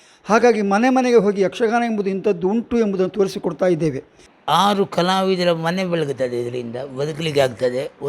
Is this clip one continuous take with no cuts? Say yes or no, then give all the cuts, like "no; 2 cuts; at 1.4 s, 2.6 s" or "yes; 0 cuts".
no; 1 cut; at 4.3 s